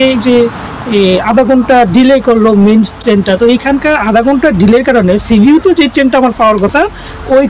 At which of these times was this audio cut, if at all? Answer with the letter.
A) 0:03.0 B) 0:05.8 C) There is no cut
C